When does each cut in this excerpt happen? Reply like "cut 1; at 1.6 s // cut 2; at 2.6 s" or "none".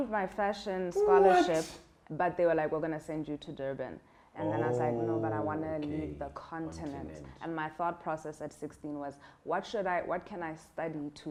none